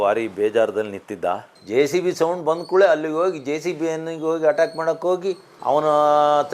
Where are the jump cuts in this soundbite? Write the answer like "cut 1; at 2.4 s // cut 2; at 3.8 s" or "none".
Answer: cut 1; at 1.5 s